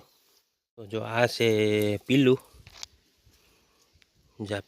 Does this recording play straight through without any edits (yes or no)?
no